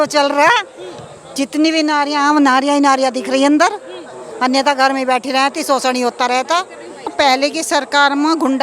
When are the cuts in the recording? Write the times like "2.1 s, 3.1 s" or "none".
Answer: 7.1 s

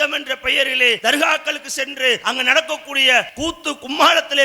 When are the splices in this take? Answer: 1.0 s, 2.2 s, 3.3 s

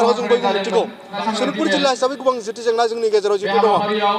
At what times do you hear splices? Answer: 1.1 s

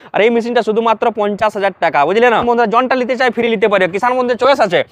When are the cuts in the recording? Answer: 2.4 s

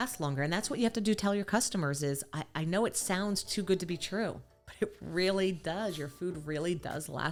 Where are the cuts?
none

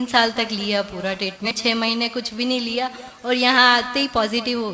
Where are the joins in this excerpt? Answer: 1.5 s

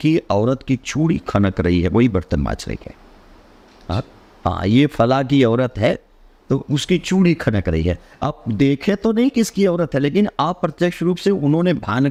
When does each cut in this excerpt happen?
none

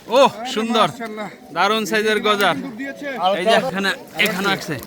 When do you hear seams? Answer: 3.7 s

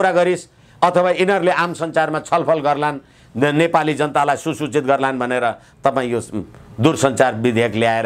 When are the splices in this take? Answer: none

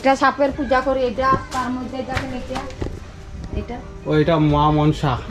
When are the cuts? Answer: none

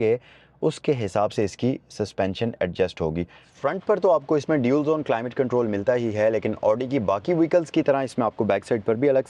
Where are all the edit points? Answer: 3.5 s

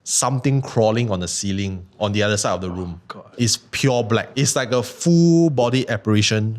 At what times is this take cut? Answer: 4.3 s

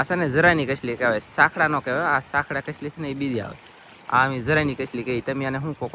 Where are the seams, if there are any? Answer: none

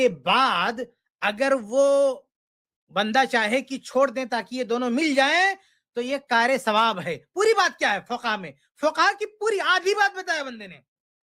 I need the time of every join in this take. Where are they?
none

